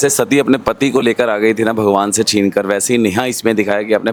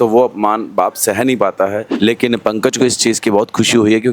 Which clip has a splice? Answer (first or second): second